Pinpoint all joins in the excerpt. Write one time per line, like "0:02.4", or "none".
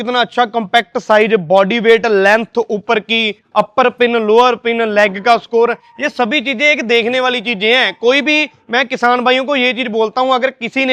none